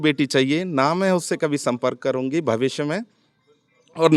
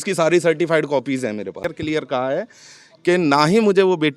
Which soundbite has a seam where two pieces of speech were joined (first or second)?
second